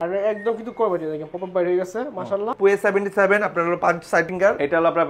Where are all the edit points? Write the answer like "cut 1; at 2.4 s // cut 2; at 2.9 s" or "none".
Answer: cut 1; at 2.5 s